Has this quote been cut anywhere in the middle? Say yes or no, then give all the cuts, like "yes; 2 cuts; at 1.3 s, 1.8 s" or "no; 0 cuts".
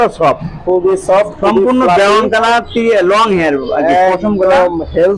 no; 0 cuts